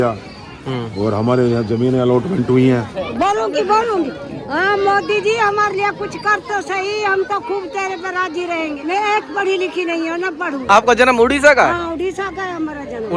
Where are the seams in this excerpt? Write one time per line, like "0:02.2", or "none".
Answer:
0:03.0
0:08.8
0:10.6